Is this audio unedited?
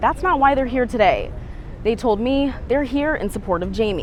yes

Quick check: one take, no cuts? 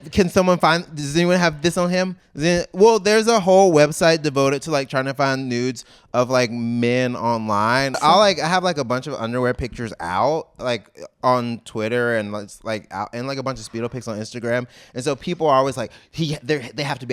no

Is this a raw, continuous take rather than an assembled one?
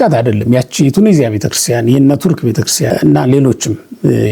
no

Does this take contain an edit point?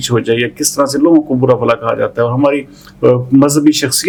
no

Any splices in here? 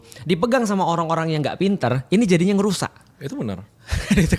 no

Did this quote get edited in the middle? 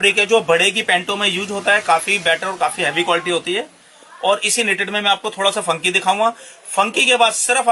no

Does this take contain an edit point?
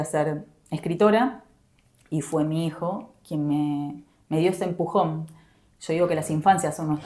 no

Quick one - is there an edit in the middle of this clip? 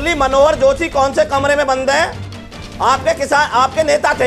no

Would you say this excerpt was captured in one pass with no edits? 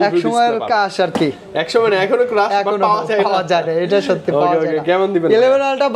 yes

